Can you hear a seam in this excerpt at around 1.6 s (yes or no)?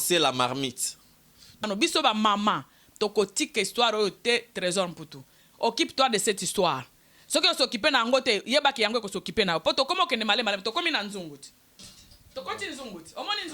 yes